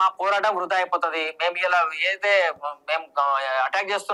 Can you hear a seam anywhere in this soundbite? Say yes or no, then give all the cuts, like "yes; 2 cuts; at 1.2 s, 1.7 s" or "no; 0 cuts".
no; 0 cuts